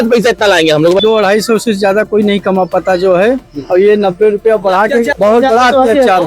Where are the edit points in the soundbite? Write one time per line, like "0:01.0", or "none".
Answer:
0:01.0
0:05.1